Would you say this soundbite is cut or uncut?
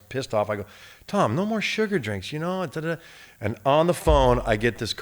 uncut